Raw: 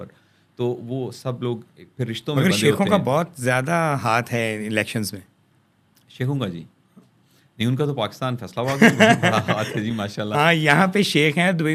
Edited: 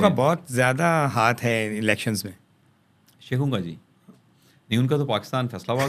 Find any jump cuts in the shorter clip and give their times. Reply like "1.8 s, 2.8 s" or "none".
none